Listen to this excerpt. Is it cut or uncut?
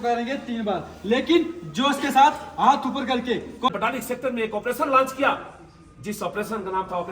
cut